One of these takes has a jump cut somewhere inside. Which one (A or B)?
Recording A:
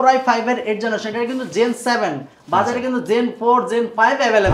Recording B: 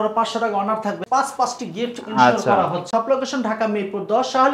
B